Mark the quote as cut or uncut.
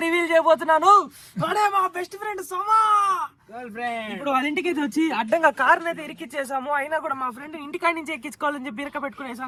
uncut